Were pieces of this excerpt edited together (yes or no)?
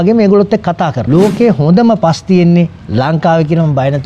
yes